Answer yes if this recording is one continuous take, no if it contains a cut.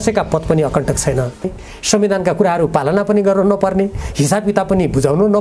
no